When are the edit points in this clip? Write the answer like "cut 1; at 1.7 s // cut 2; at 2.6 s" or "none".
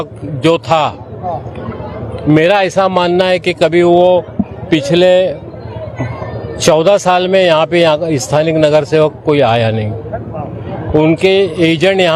none

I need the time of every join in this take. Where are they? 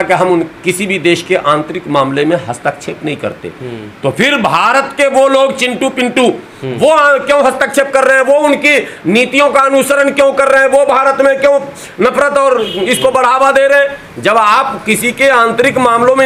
none

